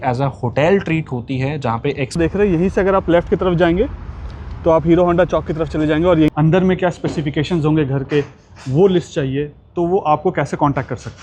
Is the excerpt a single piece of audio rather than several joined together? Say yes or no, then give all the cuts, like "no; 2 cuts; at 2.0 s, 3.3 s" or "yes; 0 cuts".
no; 2 cuts; at 2.2 s, 6.3 s